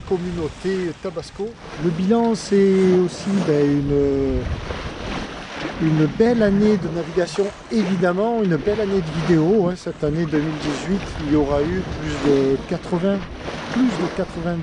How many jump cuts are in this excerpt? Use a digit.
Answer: 1